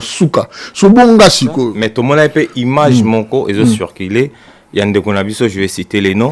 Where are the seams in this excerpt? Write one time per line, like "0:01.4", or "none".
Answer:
0:01.8

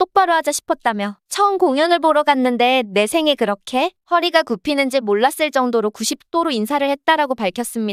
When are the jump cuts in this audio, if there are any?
none

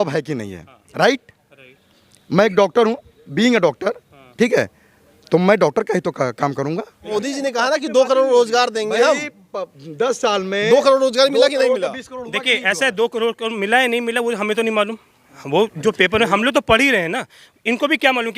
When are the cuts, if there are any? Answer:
0:06.9

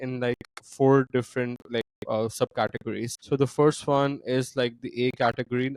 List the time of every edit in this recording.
0:01.6
0:03.1

